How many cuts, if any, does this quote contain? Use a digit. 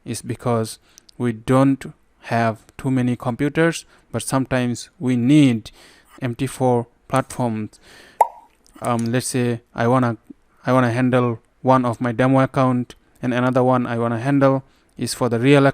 0